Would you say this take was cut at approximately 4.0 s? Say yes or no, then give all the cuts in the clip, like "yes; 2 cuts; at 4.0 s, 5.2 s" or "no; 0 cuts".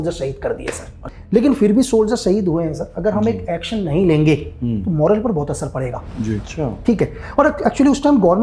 no; 2 cuts; at 1.1 s, 6.4 s